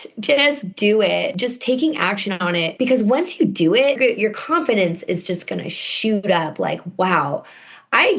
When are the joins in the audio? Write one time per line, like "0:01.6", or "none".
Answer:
0:01.3
0:02.7
0:04.0